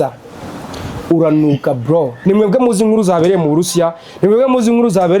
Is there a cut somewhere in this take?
yes; 1 cut; at 2.2 s

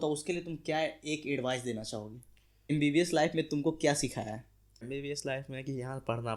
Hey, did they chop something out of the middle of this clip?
yes; 2 cuts; at 2.7 s, 4.8 s

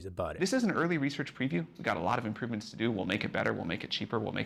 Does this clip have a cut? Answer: no; 0 cuts

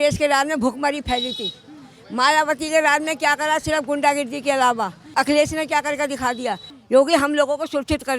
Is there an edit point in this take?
yes; 2 cuts; at 5.1 s, 6.7 s

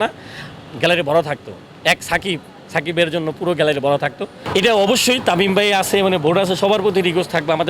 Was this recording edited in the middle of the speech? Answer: yes; 1 cut; at 4.4 s

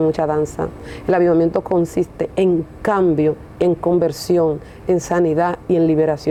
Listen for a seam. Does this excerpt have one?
no; 0 cuts

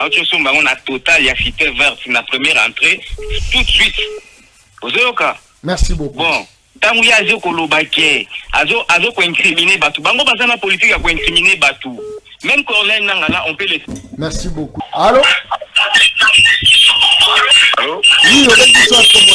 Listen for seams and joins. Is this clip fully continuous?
no; 1 cut; at 14.8 s

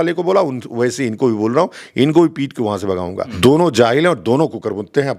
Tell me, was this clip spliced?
yes; 1 cut; at 3.2 s

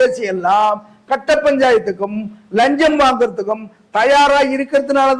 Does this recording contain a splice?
no; 0 cuts

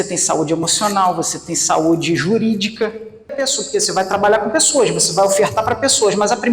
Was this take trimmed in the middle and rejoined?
yes; 1 cut; at 3.4 s

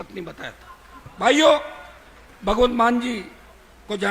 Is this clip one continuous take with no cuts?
yes; 0 cuts

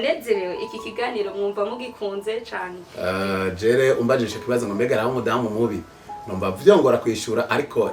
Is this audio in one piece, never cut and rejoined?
no; 1 cut; at 2.8 s

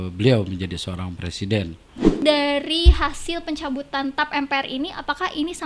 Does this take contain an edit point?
yes; 1 cut; at 2.1 s

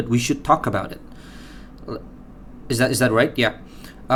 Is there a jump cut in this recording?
no; 0 cuts

